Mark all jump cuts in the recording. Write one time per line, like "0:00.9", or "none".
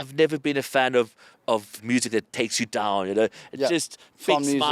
0:01.8

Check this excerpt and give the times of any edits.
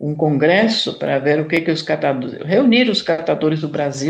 none

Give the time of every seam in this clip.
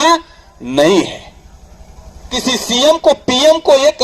0:02.3

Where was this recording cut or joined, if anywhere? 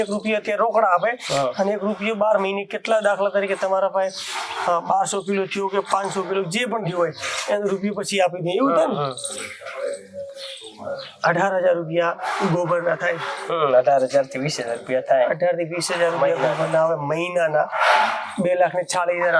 none

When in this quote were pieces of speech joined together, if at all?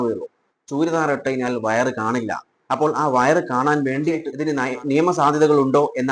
0:04.4

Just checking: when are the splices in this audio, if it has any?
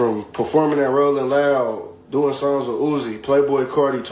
none

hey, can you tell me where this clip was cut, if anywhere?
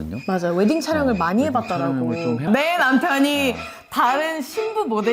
0:02.4

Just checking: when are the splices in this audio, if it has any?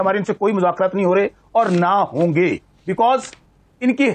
none

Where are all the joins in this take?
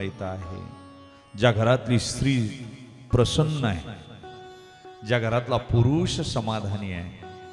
none

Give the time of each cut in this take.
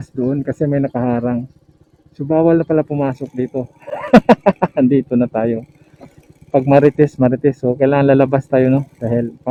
none

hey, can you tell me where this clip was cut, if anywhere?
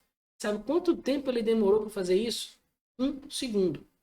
none

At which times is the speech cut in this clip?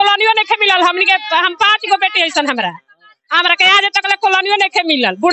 none

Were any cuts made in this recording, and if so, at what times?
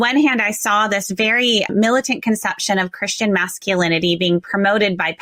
0:01.7

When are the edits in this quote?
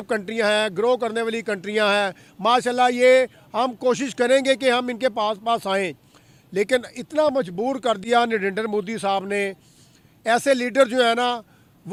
none

